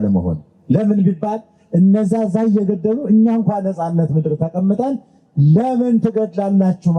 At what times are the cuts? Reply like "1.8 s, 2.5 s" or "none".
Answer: none